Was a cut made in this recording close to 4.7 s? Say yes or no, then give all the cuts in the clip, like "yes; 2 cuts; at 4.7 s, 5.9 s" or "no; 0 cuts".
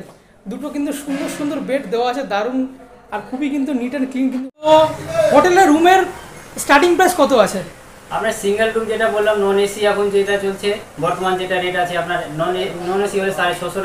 yes; 1 cut; at 4.7 s